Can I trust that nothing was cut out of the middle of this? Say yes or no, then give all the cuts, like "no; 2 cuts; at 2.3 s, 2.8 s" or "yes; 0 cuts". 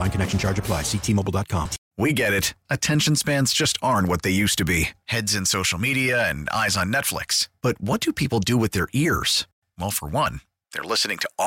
no; 1 cut; at 1.8 s